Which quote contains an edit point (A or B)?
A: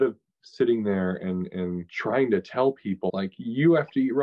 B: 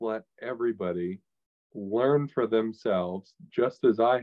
A